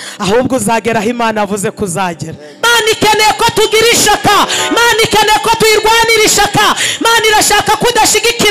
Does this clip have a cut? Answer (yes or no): yes